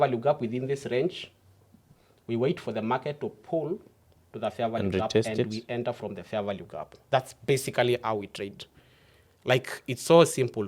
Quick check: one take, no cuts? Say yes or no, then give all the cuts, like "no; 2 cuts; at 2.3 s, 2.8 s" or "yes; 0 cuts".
yes; 0 cuts